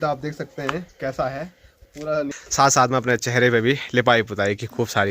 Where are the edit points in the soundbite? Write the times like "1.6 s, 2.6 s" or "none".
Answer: 2.4 s